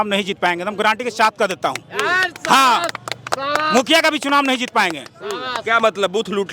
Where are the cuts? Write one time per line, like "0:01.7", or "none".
none